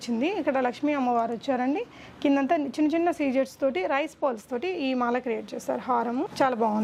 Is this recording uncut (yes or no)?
yes